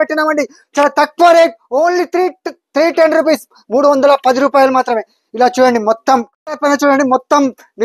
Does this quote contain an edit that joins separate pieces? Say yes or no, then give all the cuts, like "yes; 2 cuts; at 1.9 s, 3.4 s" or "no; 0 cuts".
yes; 1 cut; at 6.4 s